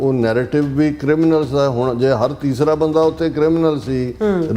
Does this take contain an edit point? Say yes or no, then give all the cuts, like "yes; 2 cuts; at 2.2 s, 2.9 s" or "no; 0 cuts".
no; 0 cuts